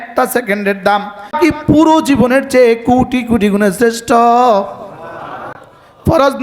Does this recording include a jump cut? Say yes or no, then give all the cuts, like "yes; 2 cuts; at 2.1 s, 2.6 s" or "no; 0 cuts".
yes; 1 cut; at 1.4 s